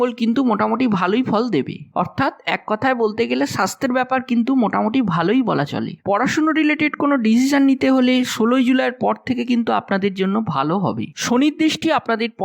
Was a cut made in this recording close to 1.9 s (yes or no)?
no